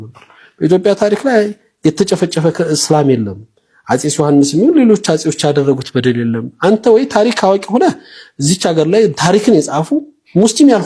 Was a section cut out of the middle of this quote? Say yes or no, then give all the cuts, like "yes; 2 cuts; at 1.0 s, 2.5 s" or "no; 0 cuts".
no; 0 cuts